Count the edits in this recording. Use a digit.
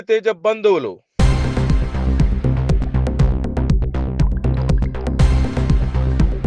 0